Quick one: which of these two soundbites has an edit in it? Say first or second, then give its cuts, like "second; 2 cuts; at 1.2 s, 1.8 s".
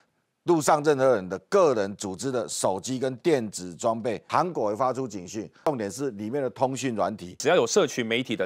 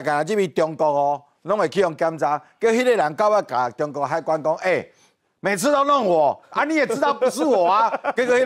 first; 3 cuts; at 4.2 s, 5.7 s, 7.4 s